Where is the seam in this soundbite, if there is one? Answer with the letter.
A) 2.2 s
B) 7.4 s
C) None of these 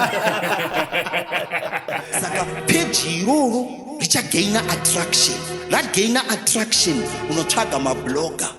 A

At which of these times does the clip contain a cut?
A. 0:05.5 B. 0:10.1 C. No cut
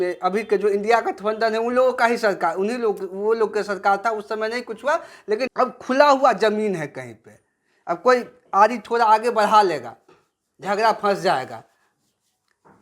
A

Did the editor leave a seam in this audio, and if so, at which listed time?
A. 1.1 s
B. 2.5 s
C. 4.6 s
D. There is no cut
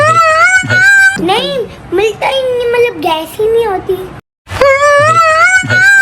A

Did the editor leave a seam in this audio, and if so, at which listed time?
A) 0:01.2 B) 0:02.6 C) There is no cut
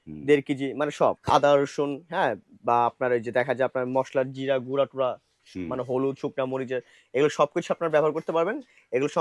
A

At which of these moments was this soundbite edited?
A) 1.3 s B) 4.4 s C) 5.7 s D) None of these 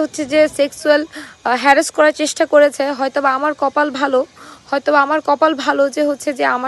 D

